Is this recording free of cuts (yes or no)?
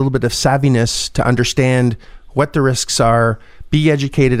yes